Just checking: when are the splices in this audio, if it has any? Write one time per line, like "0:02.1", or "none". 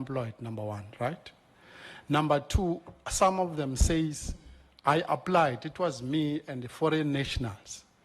none